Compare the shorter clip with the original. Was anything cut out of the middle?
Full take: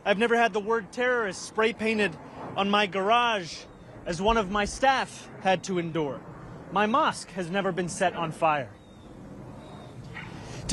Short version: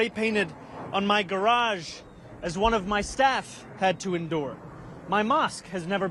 no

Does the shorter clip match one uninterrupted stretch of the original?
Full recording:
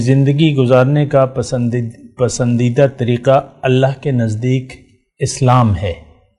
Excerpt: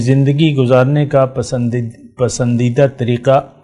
yes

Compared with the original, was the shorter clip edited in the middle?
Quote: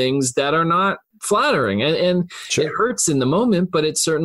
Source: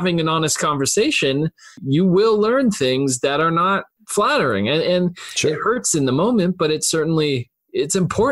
no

